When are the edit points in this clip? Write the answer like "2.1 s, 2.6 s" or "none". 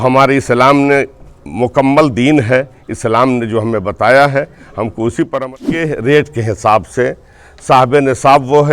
5.5 s